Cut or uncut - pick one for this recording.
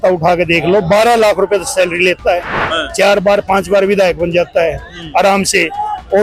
uncut